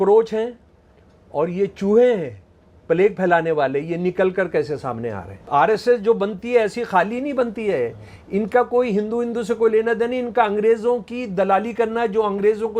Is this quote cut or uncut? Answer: cut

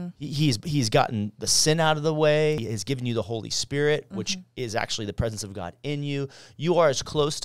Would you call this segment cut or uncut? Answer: cut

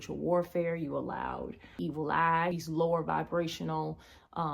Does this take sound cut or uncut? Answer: cut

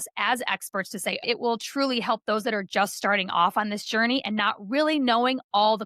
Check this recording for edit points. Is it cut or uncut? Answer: cut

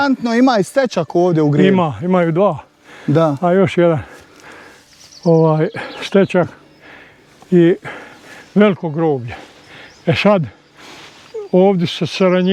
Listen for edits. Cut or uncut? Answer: uncut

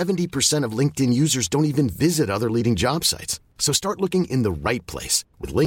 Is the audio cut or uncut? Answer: uncut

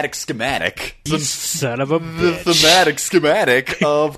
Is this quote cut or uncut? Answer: cut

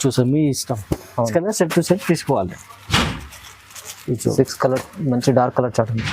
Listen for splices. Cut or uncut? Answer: cut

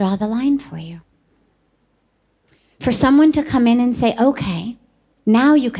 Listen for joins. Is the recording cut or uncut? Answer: uncut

